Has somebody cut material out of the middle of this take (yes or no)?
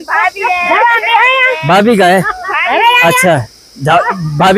no